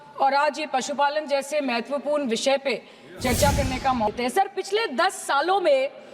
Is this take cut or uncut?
cut